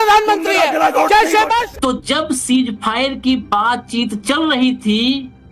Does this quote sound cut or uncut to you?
cut